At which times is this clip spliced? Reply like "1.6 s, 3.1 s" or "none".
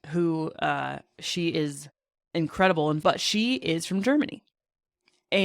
3.0 s